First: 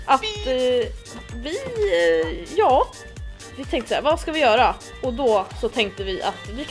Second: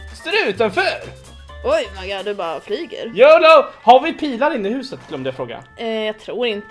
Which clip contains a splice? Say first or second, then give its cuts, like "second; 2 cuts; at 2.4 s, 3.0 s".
second; 1 cut; at 4.9 s